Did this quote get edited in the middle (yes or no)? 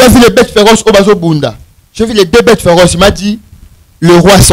no